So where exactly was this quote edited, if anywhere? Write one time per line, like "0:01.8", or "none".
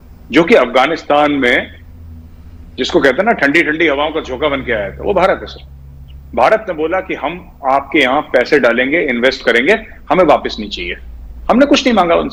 none